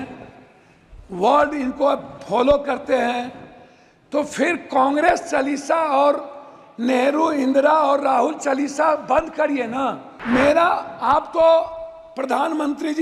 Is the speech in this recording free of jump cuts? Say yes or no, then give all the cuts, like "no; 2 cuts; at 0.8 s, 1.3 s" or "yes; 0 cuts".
no; 1 cut; at 10.1 s